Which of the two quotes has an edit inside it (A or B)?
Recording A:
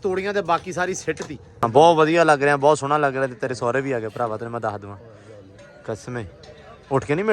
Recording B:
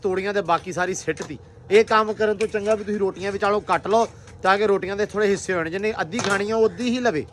A